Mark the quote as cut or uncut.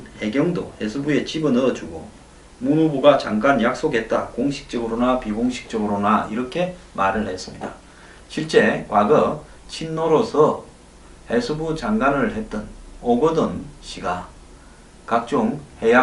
cut